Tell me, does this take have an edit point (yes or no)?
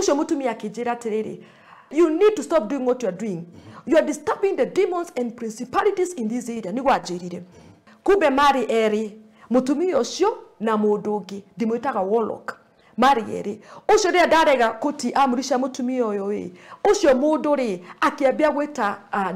yes